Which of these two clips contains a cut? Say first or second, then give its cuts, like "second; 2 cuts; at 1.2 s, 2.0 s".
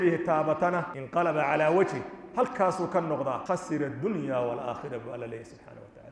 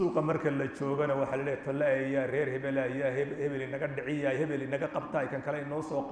first; 2 cuts; at 1.0 s, 3.4 s